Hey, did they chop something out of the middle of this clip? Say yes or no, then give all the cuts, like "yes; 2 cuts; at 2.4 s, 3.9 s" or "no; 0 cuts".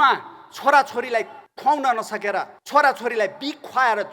yes; 2 cuts; at 1.4 s, 2.6 s